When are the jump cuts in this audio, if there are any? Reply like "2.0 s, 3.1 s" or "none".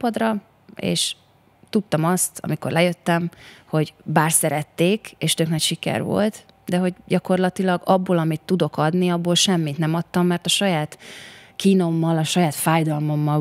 none